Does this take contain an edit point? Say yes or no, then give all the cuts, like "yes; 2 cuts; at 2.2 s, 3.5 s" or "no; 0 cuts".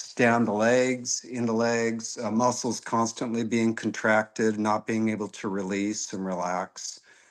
no; 0 cuts